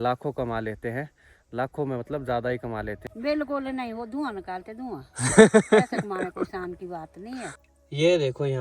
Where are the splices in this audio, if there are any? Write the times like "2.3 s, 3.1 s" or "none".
3.1 s, 7.5 s

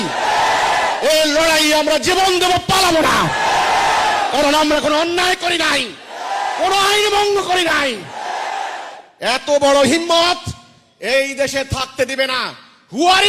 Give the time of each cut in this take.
none

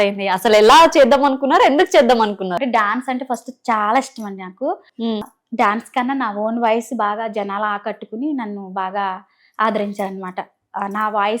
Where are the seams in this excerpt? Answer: 2.6 s, 5.2 s

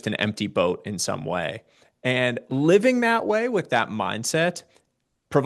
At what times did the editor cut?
none

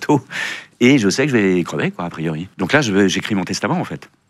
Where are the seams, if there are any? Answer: 2.5 s

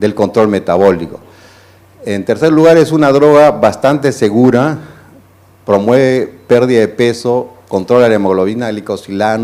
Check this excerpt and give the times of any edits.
6.7 s

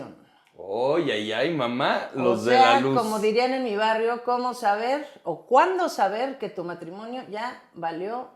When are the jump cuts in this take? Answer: none

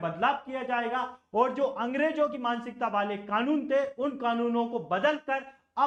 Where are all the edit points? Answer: none

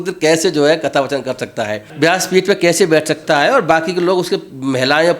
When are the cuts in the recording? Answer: 1.9 s

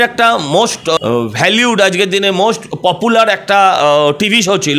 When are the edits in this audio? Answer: 1.0 s

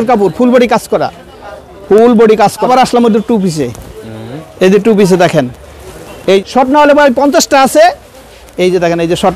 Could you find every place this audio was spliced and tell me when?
2.7 s, 6.4 s

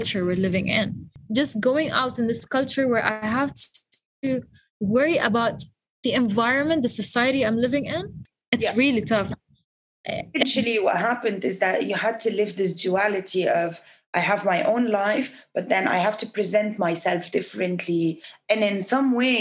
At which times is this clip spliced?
1.2 s, 8.2 s, 10.4 s, 18.3 s

